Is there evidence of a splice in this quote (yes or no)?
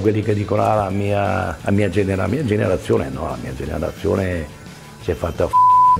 no